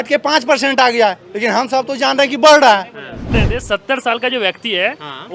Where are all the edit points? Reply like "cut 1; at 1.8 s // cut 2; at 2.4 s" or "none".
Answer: cut 1; at 3.3 s